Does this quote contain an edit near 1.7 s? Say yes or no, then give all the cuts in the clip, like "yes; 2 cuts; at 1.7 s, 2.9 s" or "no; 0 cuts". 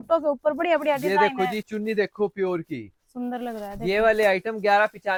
no; 0 cuts